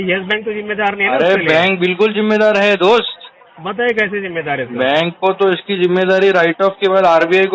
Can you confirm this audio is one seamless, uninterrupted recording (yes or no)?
yes